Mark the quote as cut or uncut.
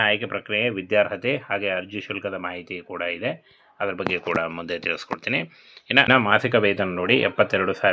cut